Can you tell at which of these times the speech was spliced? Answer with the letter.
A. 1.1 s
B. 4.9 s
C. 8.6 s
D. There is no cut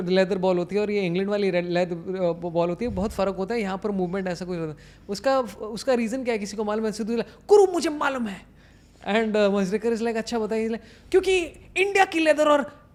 D